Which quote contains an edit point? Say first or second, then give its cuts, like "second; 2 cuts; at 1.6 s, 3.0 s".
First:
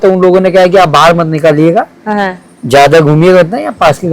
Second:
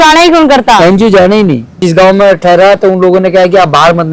second; 1 cut; at 1.8 s